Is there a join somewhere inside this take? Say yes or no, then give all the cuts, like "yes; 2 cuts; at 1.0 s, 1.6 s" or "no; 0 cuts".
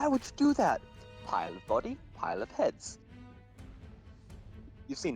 yes; 1 cut; at 3.2 s